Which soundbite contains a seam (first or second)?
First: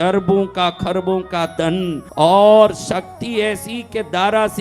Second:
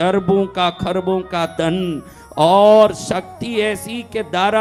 first